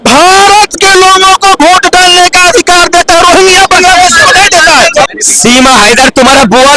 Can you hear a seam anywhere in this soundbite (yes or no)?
yes